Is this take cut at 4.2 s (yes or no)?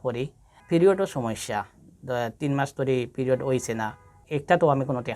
yes